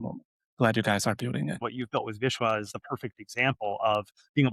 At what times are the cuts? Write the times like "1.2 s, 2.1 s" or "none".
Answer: 1.6 s, 2.8 s